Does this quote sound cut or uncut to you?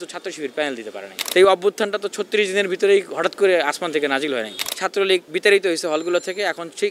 cut